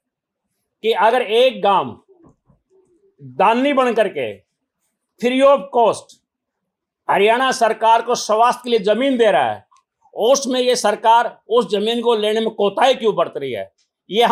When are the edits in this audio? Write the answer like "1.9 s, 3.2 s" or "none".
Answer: none